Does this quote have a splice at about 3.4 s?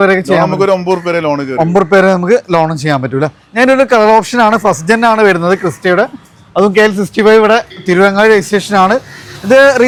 no; 0 cuts

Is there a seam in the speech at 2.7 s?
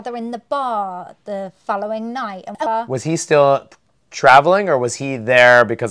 yes; 1 cut; at 2.7 s

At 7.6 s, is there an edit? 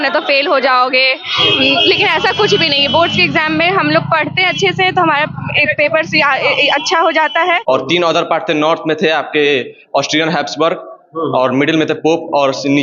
yes; 1 cut; at 7.6 s

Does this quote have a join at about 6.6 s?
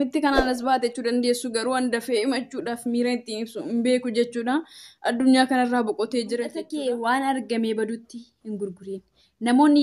yes; 1 cut; at 6.6 s

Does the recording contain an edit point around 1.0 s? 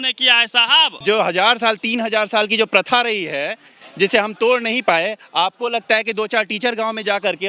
yes; 1 cut; at 1.0 s

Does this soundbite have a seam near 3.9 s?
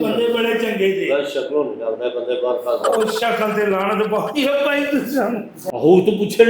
no; 1 cut; at 5.5 s

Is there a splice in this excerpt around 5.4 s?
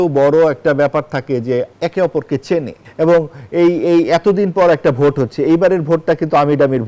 no; 2 cuts; at 1.7 s, 2.8 s

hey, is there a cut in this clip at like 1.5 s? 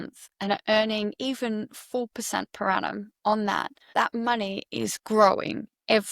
no; 1 cut; at 3.8 s

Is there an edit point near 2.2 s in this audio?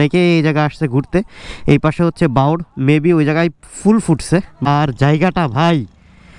no; 1 cut; at 4.5 s

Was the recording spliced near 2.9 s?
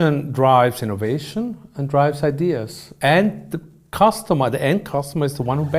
yes; 1 cut; at 2.9 s

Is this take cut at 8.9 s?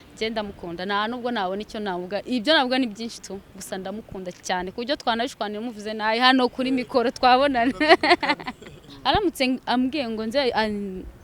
yes; 1 cut; at 8.9 s

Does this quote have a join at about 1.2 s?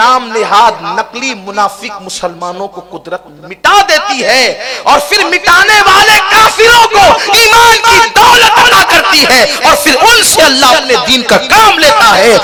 no; 0 cuts

